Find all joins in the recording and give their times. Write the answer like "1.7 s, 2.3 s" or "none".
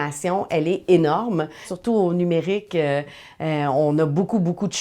1.7 s